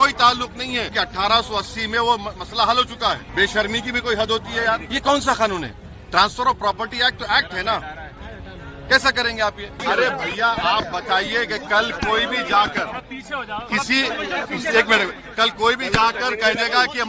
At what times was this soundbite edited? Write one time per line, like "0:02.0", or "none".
0:00.9
0:03.2
0:04.9
0:09.7